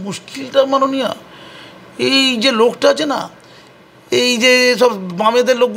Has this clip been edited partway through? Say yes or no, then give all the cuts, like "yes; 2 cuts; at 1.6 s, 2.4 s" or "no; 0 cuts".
no; 0 cuts